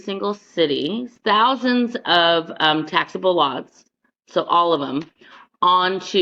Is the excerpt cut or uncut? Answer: cut